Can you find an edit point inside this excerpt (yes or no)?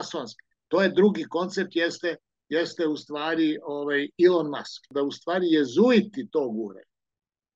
yes